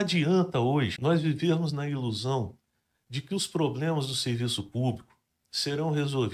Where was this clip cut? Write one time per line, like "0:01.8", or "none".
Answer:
0:00.9